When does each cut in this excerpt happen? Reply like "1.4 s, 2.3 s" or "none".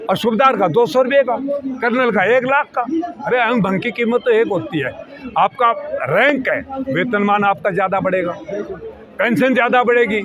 none